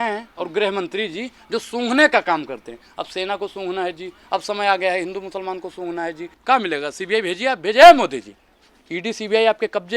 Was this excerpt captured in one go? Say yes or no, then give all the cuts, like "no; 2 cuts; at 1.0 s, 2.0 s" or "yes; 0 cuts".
no; 1 cut; at 6.3 s